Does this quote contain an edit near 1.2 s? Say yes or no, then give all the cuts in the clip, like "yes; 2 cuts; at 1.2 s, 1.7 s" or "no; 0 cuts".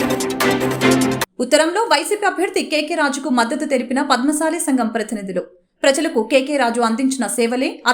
yes; 1 cut; at 1.2 s